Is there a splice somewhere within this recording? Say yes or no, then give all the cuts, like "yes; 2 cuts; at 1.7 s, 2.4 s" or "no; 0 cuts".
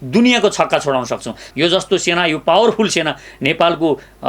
yes; 1 cut; at 1.4 s